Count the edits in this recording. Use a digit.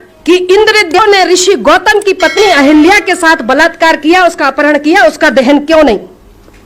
1